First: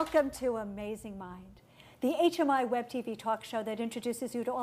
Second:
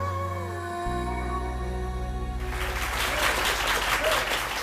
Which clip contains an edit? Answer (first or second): second